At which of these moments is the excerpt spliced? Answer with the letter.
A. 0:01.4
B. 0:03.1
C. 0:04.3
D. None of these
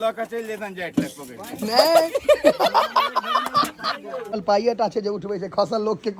C